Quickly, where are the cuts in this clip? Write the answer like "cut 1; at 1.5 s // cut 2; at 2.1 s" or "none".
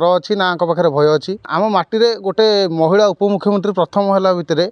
cut 1; at 1.4 s